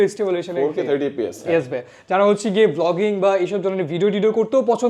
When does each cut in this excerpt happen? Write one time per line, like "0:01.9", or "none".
none